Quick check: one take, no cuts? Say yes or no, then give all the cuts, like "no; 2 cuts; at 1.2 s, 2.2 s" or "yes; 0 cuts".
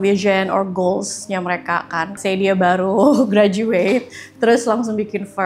no; 1 cut; at 2.2 s